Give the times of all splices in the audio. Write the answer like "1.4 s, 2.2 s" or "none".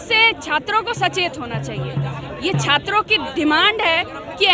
none